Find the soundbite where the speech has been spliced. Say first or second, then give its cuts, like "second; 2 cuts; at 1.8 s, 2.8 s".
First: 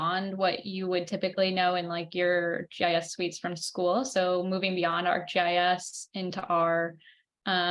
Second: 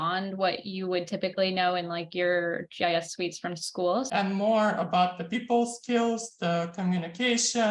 second; 1 cut; at 4.1 s